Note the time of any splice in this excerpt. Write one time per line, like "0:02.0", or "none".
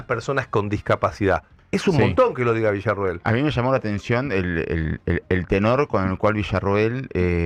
none